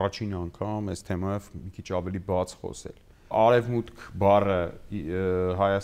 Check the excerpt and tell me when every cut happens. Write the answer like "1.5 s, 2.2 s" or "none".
3.3 s